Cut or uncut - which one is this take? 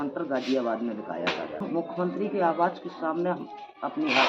cut